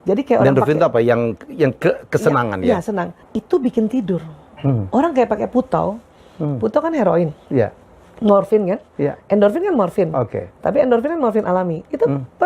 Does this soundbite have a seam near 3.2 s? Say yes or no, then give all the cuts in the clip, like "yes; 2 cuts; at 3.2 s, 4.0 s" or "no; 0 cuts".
yes; 1 cut; at 3.2 s